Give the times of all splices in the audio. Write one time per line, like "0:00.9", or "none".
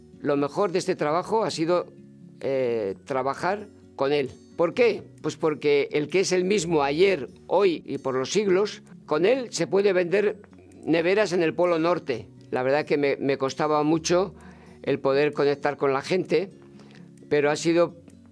0:04.4
0:07.8
0:08.9
0:12.5